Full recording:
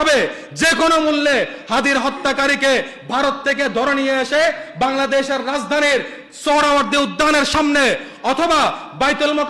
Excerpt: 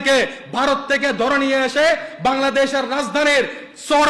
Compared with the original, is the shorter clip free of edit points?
yes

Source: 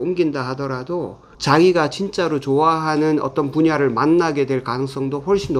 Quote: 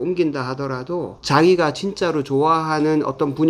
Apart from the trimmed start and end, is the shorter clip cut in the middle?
yes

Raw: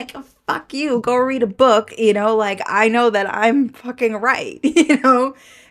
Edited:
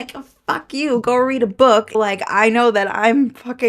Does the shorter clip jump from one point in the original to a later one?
yes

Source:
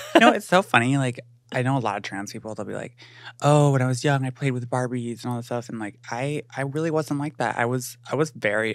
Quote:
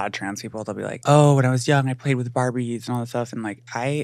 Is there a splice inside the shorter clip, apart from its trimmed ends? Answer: yes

